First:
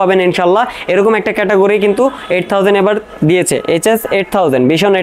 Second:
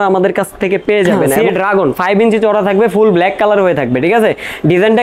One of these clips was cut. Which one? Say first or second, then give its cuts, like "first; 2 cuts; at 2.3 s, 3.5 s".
second; 1 cut; at 1.3 s